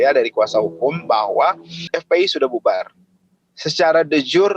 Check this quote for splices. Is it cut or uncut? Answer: cut